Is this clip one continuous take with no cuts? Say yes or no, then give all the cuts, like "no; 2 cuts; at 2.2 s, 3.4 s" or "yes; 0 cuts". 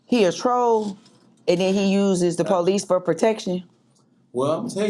yes; 0 cuts